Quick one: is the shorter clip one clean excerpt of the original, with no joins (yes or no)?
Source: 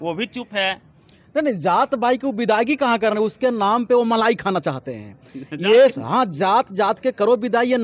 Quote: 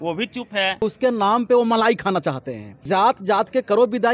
no